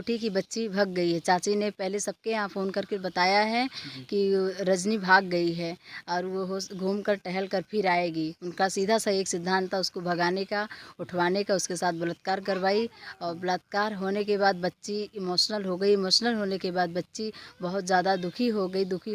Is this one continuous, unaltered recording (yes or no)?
yes